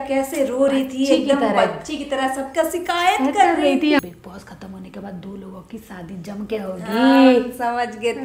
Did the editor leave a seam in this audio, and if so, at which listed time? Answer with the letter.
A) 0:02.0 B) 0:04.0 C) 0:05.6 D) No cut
B